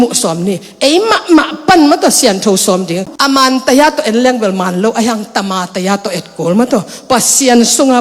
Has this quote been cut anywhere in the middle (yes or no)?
yes